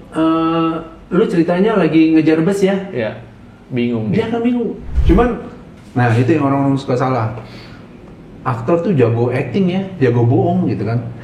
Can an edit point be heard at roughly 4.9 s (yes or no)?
yes